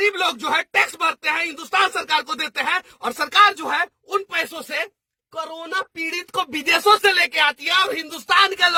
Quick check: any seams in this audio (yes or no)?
no